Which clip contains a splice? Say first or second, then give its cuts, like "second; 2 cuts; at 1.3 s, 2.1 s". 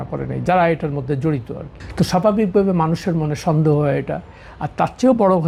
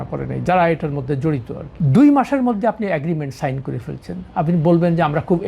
second; 1 cut; at 1.7 s